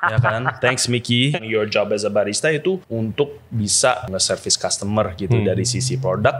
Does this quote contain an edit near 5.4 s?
no; 3 cuts; at 1.4 s, 2.9 s, 4.1 s

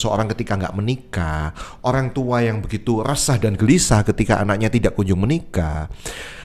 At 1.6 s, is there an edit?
no; 0 cuts

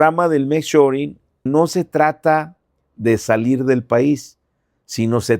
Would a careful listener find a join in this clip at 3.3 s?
no; 1 cut; at 1.5 s

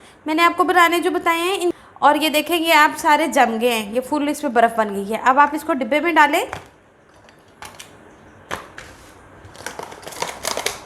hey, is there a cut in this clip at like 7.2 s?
no; 1 cut; at 1.7 s

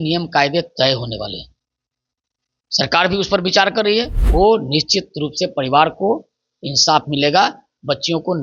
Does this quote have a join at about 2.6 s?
no; 1 cut; at 4.2 s

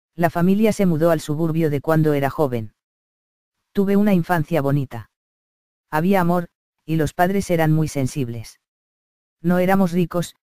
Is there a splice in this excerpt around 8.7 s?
no; 1 cut; at 6.4 s

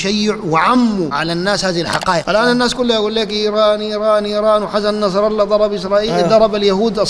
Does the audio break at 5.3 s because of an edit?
no; 2 cuts; at 1.1 s, 2.2 s

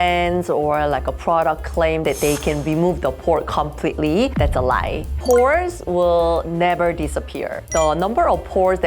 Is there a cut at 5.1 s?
yes; 1 cut; at 5.1 s

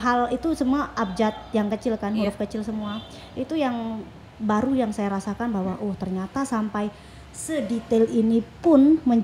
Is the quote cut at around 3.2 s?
no; 0 cuts

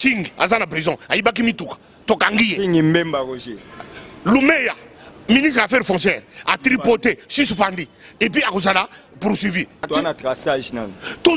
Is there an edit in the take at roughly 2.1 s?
no; 1 cut; at 9.9 s

